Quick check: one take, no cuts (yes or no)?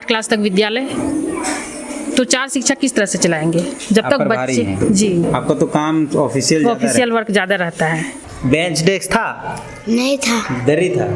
no